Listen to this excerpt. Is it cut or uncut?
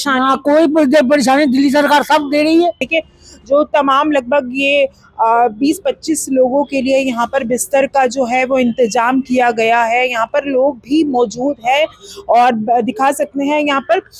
cut